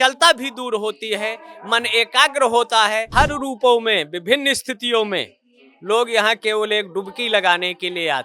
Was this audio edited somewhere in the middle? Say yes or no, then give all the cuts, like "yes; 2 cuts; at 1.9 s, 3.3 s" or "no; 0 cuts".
yes; 1 cut; at 3.1 s